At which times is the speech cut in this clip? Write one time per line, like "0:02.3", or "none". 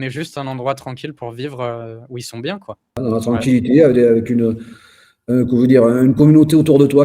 0:03.0

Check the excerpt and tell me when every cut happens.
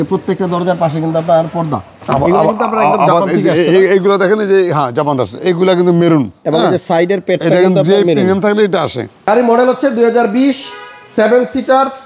0:09.1

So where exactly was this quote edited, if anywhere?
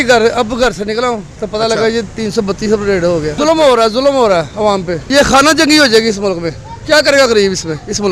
none

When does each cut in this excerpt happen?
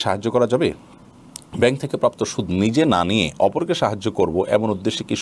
none

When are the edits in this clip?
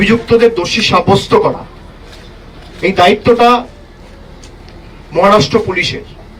none

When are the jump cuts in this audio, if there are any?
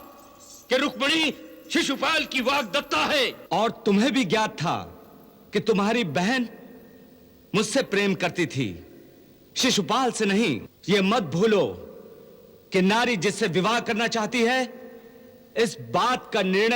0:03.4
0:10.7

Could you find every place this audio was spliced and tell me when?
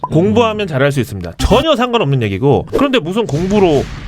0:02.7

